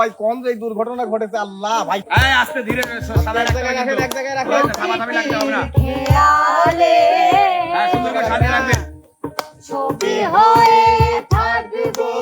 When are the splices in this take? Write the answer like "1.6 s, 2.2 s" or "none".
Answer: 2.0 s